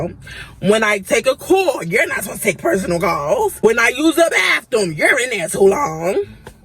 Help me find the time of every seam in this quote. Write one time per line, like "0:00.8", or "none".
0:03.6